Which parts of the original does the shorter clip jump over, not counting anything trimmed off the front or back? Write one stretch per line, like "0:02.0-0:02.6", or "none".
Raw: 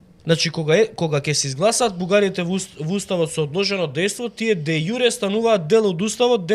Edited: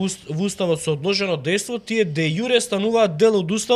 none